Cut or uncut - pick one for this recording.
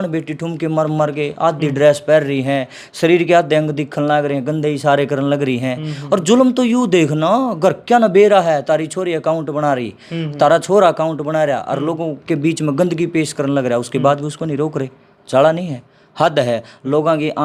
uncut